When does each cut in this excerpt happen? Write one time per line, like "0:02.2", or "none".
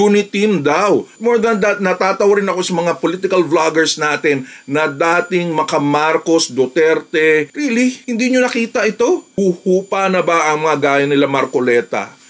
0:01.1
0:07.5
0:09.3